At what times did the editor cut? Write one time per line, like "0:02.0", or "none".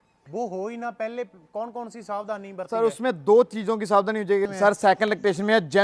0:04.5

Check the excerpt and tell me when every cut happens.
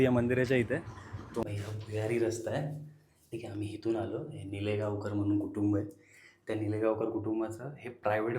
0:01.4

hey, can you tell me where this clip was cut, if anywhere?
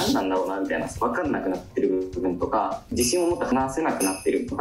0:02.9

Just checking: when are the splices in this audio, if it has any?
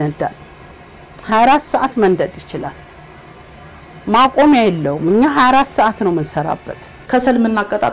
0:07.0

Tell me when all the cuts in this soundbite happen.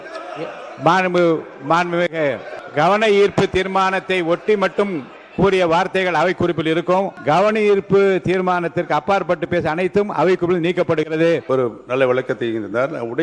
0:02.5
0:07.2
0:11.4

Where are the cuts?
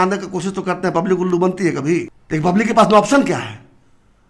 0:02.2

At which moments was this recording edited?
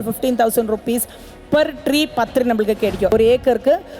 0:03.1

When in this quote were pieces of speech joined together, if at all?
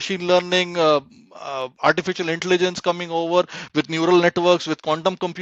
none

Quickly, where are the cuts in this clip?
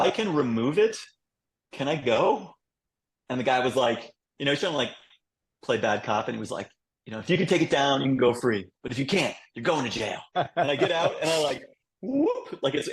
0:10.3

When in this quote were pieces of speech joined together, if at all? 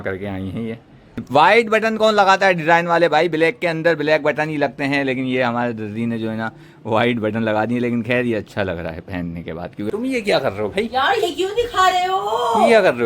0:01.2
0:09.9

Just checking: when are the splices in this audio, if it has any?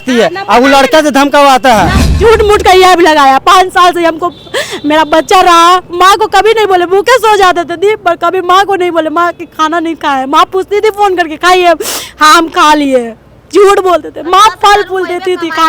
0:02.1

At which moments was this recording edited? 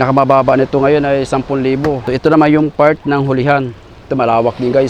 0:02.0

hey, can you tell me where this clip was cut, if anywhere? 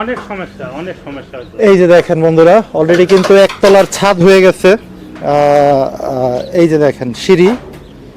none

